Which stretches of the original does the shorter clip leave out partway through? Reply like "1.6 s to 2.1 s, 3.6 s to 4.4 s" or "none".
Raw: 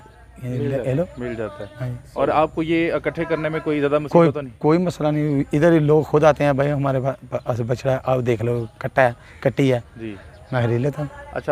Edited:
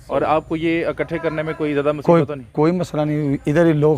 none